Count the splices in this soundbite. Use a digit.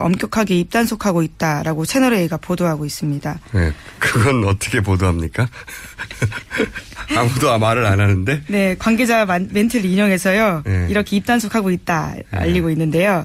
1